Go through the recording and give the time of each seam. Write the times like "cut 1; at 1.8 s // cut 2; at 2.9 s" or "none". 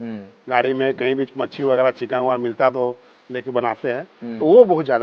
none